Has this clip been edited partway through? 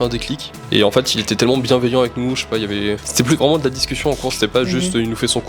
yes; 1 cut; at 3.1 s

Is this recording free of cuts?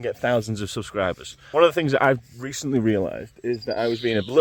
no; 1 cut; at 1.3 s

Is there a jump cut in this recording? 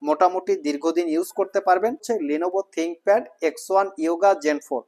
yes; 1 cut; at 2.0 s

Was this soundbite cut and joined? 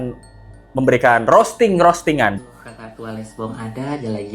yes; 1 cut; at 2.3 s

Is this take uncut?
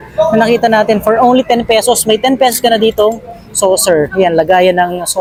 yes; 0 cuts

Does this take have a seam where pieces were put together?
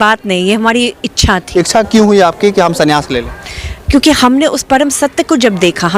yes; 1 cut; at 1.4 s

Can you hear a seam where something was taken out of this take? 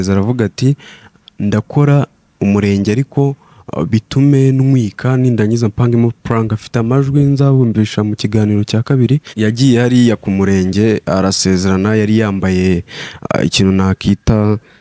yes; 1 cut; at 9.3 s

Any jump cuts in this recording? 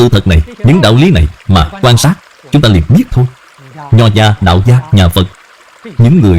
no; 0 cuts

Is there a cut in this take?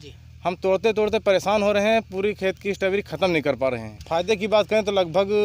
yes; 1 cut; at 3.9 s

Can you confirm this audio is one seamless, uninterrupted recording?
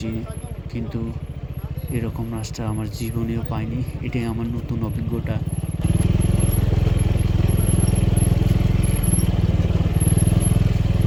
yes; 0 cuts

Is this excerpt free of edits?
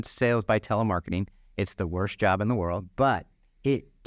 no; 1 cut; at 2.9 s

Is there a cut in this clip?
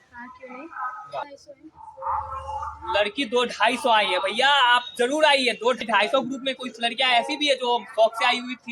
yes; 2 cuts; at 1.2 s, 5.8 s

